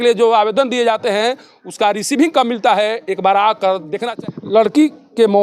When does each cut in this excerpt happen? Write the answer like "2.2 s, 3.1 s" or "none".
4.0 s